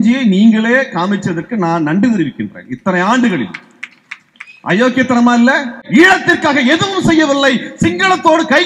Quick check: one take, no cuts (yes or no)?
no